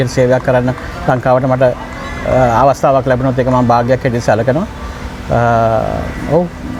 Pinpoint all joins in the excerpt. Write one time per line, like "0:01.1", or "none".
none